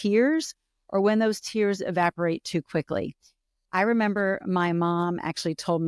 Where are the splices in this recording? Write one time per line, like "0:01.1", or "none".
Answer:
none